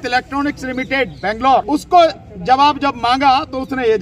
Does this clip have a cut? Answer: yes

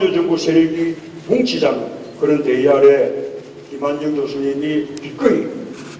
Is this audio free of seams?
yes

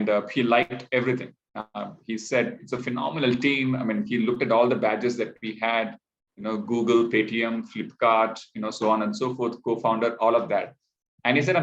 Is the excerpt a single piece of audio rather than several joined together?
yes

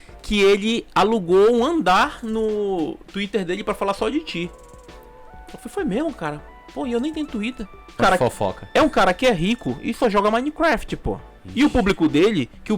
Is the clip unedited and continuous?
no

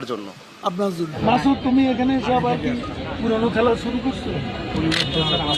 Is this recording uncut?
no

